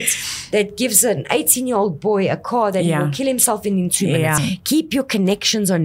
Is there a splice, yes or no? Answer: yes